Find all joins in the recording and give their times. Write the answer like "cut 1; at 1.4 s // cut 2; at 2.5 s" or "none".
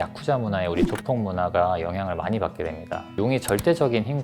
cut 1; at 3.1 s